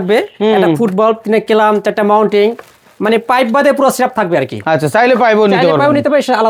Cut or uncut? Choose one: uncut